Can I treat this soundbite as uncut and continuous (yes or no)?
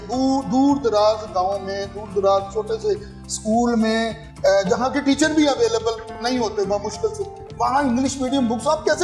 yes